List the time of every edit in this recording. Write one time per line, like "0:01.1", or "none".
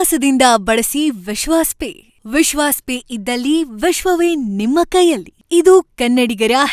none

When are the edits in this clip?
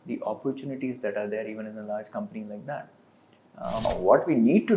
0:03.8

